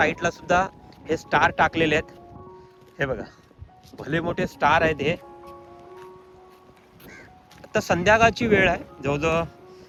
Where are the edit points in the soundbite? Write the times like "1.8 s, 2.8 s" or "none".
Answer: none